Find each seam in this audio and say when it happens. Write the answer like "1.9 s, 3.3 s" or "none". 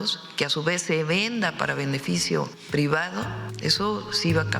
2.6 s, 3.4 s